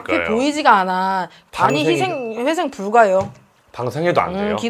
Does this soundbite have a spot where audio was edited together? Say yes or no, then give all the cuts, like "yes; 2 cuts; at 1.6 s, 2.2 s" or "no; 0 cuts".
yes; 1 cut; at 1.4 s